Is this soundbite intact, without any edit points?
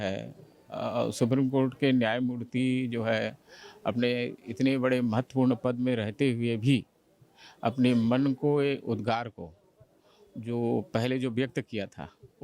yes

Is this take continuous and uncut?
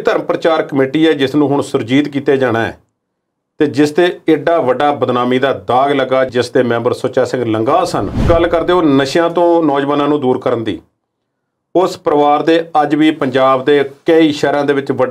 no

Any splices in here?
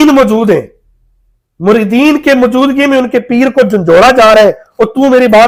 no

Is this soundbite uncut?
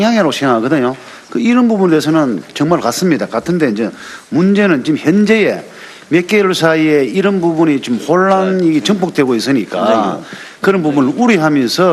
no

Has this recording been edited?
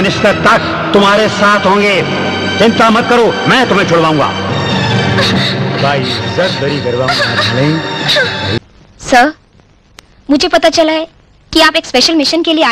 yes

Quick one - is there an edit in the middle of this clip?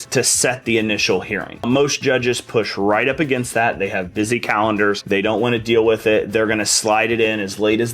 yes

